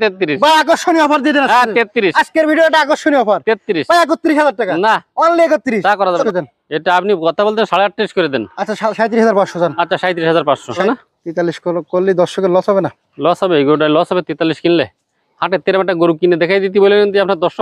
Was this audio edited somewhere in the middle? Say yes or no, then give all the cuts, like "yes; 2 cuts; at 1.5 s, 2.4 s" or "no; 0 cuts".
yes; 2 cuts; at 6.2 s, 10.8 s